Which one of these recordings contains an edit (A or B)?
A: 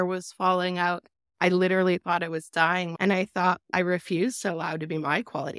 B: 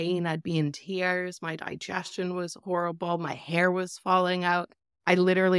A